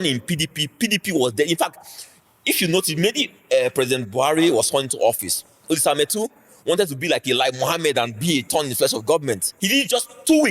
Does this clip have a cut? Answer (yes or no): yes